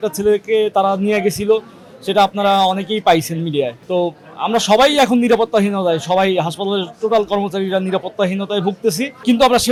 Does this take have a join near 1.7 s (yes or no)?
no